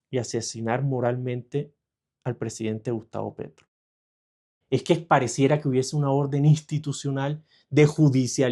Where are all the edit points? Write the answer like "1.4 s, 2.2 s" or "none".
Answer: 4.3 s